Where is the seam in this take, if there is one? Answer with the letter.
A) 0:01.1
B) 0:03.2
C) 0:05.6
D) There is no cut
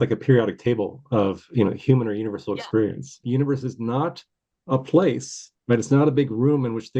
B